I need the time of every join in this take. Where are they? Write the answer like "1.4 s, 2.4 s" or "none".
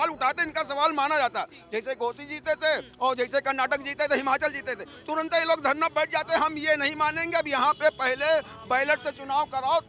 none

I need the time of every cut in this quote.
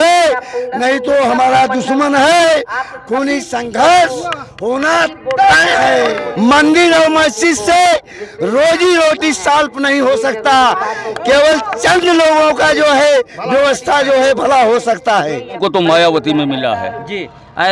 6.2 s, 15.6 s

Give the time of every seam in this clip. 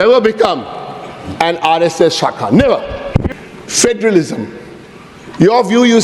3.3 s

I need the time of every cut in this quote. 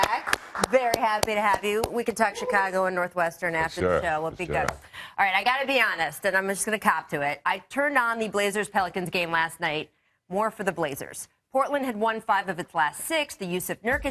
5.1 s

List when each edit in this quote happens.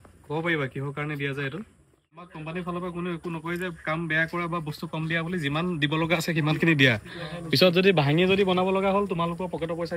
2.3 s

